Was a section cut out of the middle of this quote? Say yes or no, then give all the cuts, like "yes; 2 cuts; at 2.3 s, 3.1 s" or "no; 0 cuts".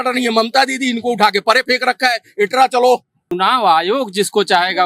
yes; 1 cut; at 3.2 s